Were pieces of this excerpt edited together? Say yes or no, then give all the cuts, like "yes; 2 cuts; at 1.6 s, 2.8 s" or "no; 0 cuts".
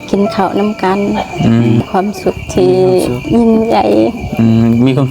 yes; 1 cut; at 1.8 s